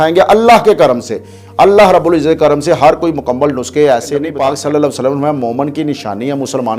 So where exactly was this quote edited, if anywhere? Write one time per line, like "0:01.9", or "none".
0:04.3